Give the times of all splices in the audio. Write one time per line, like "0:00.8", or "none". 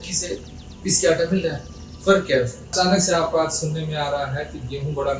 0:02.7